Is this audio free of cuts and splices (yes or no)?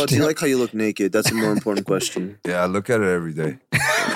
yes